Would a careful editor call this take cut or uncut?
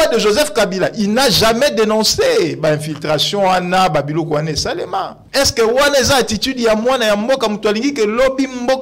cut